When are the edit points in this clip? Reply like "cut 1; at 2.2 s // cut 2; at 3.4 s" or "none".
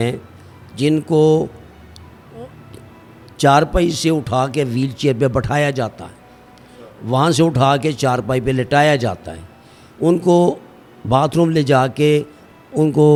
none